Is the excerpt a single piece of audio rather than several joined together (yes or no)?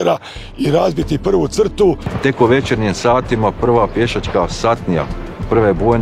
no